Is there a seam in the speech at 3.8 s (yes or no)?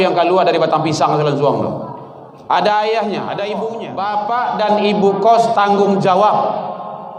yes